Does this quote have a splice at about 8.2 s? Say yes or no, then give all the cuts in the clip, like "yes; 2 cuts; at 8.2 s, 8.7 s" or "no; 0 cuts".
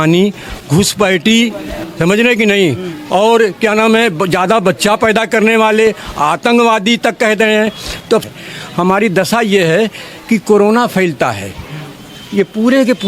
yes; 1 cut; at 8.2 s